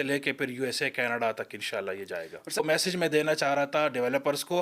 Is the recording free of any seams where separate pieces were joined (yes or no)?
no